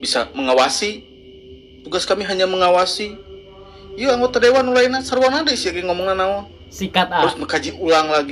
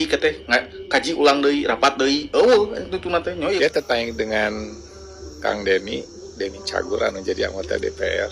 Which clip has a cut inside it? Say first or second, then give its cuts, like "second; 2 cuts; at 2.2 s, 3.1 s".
second; 1 cut; at 3.6 s